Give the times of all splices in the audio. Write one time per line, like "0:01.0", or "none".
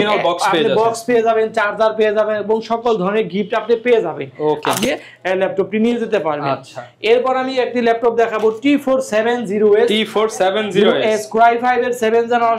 0:04.8